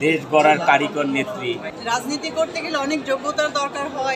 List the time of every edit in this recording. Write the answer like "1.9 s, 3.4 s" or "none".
1.6 s